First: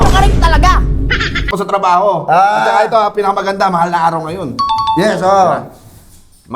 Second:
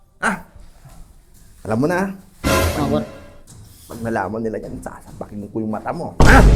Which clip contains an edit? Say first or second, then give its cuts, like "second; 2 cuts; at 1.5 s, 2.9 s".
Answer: first; 1 cut; at 1.5 s